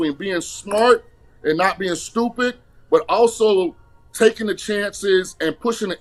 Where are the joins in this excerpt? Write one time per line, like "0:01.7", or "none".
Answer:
none